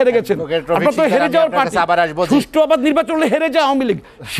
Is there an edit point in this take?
no; 0 cuts

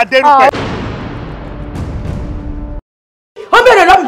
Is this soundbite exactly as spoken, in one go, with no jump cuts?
no; 1 cut; at 3.1 s

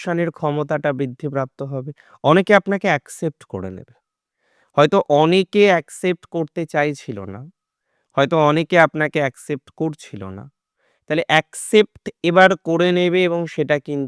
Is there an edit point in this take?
no; 0 cuts

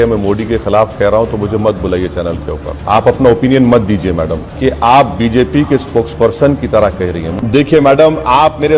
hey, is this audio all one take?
no; 3 cuts; at 2.8 s, 4.4 s, 7.3 s

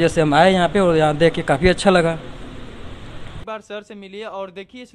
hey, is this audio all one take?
no; 1 cut; at 3.4 s

